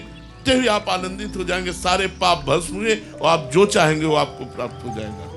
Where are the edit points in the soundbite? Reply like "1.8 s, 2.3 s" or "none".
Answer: none